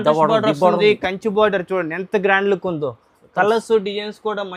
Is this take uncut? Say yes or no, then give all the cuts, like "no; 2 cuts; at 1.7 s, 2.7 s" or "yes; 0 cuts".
yes; 0 cuts